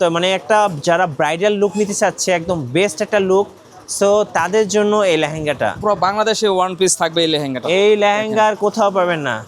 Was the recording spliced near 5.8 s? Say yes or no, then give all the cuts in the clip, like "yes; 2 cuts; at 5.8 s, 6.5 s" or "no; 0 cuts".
yes; 1 cut; at 5.8 s